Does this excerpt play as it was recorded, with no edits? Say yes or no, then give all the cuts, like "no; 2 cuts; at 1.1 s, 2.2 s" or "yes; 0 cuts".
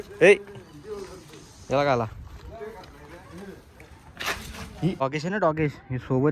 no; 1 cut; at 5.0 s